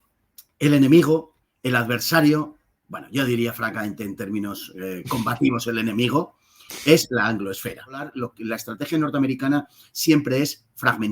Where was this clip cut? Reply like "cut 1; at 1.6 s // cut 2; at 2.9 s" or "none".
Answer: cut 1; at 8.2 s